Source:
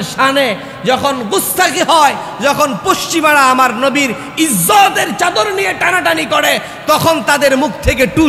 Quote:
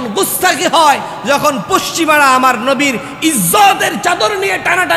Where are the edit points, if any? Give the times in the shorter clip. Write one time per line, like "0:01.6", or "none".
none